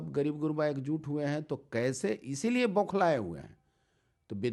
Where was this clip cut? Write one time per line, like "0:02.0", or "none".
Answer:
none